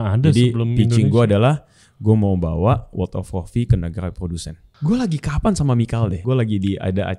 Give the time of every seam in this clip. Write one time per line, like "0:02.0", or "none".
0:04.7
0:06.2